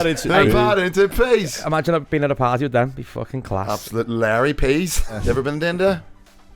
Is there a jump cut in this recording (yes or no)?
yes